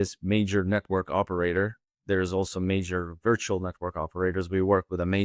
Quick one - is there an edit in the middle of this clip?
no; 0 cuts

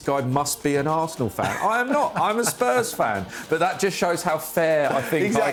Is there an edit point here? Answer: no; 0 cuts

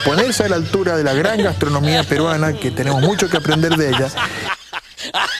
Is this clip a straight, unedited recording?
yes; 0 cuts

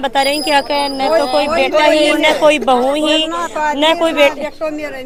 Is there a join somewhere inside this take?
no; 0 cuts

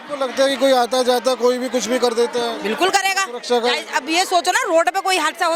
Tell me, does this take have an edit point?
no; 0 cuts

